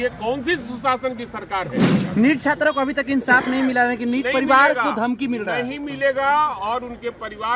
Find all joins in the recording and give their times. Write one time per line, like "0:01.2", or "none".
0:01.9